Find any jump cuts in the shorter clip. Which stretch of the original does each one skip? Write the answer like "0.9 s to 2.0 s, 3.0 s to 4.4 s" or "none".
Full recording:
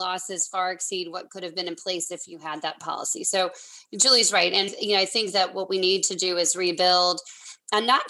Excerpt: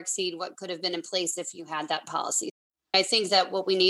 3.5 s to 4.8 s